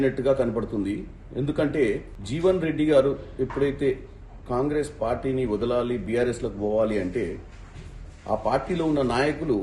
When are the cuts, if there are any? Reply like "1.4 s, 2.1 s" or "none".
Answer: 2.1 s